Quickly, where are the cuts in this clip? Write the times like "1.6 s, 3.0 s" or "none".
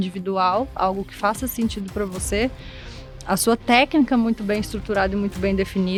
none